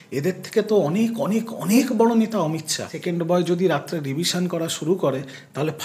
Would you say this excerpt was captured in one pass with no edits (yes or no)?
no